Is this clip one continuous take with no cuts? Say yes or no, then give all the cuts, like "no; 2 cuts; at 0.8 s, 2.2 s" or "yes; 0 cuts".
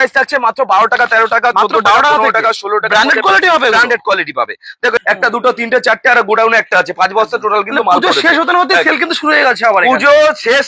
no; 1 cut; at 5.0 s